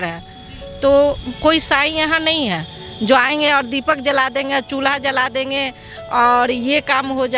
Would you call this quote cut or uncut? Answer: uncut